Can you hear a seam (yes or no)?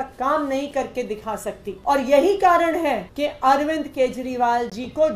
yes